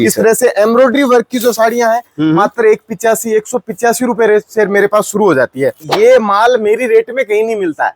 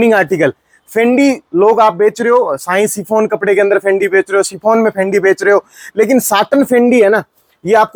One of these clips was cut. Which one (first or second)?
first